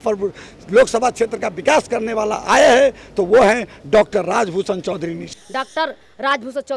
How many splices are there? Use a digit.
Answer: 1